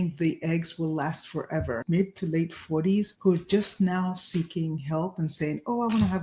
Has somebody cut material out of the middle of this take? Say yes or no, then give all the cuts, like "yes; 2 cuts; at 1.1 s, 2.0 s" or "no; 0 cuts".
yes; 1 cut; at 1.8 s